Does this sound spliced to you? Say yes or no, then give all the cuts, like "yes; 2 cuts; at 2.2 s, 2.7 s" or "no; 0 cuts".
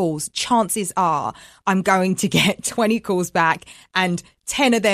no; 0 cuts